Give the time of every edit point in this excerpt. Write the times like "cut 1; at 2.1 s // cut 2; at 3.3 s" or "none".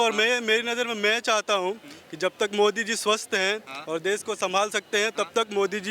none